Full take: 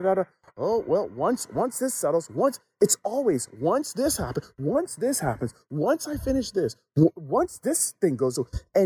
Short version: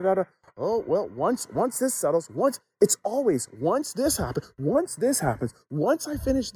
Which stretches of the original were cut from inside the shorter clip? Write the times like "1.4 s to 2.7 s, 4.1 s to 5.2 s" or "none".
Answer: none